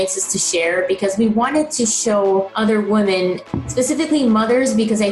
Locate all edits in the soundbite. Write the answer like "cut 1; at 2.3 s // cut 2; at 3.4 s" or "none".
cut 1; at 3.5 s